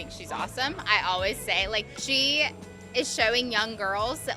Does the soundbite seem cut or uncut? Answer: cut